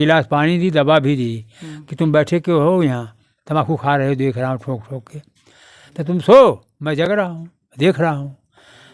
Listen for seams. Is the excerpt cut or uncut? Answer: uncut